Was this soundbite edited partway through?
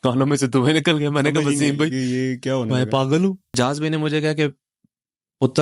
yes; 1 cut; at 3.4 s

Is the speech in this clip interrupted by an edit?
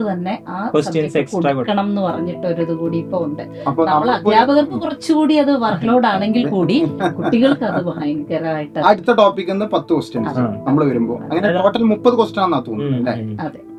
no; 0 cuts

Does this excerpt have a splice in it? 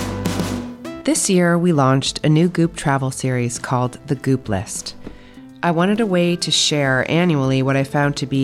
yes; 1 cut; at 1.0 s

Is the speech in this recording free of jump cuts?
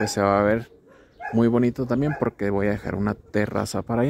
yes; 0 cuts

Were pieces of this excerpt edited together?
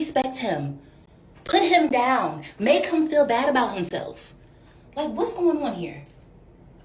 no; 0 cuts

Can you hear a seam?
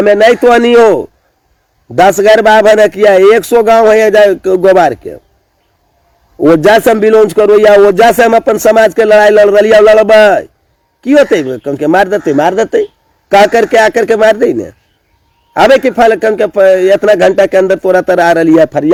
no; 0 cuts

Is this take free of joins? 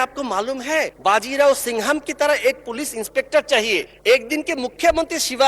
no; 2 cuts; at 0.9 s, 3.9 s

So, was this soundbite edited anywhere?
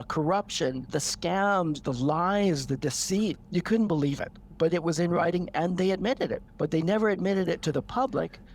yes; 2 cuts; at 3.4 s, 6.4 s

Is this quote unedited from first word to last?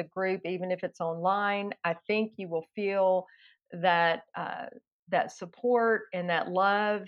yes; 0 cuts

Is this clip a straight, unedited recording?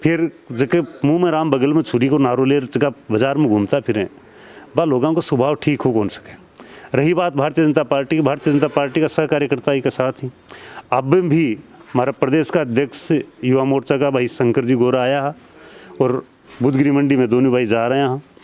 yes; 0 cuts

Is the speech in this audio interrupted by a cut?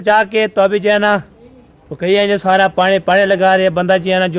no; 0 cuts

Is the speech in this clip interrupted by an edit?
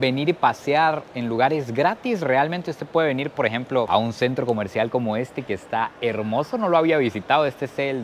no; 0 cuts

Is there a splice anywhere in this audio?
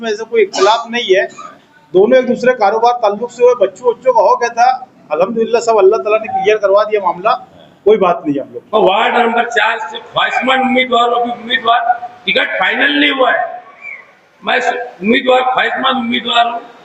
yes; 1 cut; at 8.5 s

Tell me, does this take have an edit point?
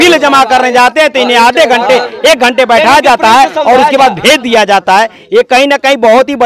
no; 0 cuts

